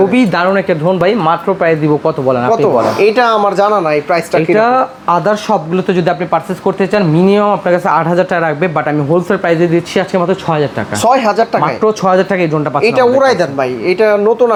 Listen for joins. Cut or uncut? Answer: uncut